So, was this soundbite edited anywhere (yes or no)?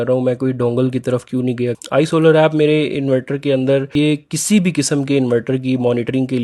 yes